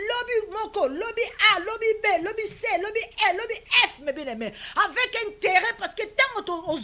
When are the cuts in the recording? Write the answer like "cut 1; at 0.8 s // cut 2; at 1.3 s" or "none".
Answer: none